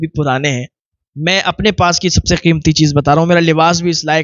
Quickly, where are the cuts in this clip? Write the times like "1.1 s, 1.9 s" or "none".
none